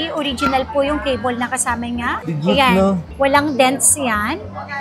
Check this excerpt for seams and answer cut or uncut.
uncut